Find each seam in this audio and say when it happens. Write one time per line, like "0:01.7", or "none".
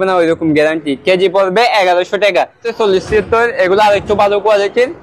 0:02.7